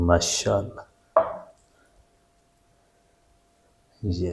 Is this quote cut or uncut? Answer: uncut